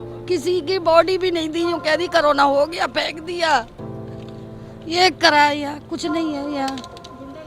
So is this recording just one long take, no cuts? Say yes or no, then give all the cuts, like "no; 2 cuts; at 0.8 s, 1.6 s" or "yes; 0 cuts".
yes; 0 cuts